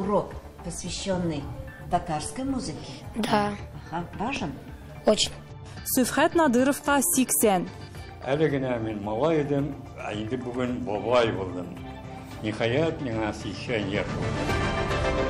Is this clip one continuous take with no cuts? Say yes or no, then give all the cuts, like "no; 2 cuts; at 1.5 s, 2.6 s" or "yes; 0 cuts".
no; 1 cut; at 14.1 s